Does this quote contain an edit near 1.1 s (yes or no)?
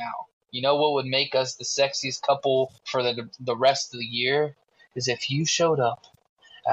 no